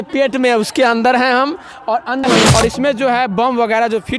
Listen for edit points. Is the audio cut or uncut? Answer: cut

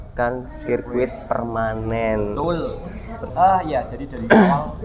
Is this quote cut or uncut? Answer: cut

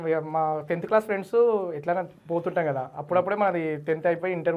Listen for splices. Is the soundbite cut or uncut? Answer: uncut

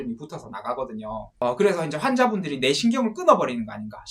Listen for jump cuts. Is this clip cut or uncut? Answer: cut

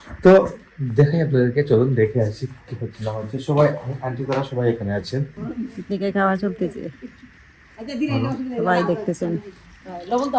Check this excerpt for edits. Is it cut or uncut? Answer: cut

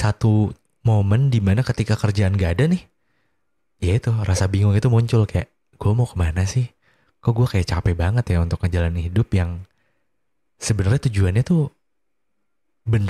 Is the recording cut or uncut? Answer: uncut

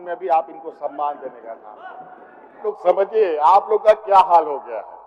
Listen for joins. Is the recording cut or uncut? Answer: cut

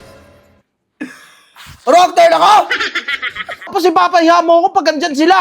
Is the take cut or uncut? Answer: cut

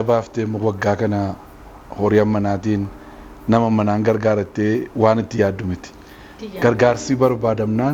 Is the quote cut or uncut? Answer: uncut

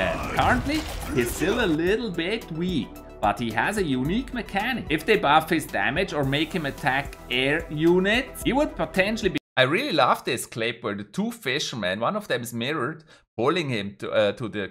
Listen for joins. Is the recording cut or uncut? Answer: uncut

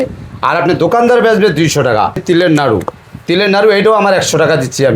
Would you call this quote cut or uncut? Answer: cut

